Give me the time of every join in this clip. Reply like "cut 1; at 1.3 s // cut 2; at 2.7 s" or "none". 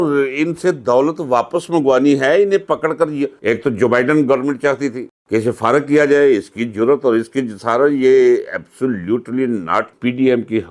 cut 1; at 3.4 s // cut 2; at 9.9 s